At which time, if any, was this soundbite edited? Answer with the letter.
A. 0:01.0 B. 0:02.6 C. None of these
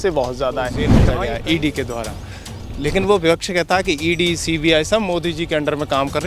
A